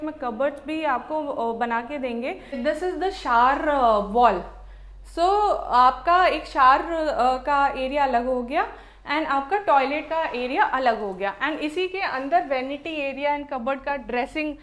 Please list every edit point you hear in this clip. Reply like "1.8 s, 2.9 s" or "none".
2.6 s